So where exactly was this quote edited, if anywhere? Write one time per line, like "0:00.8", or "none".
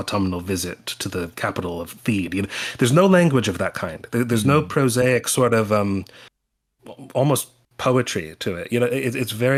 none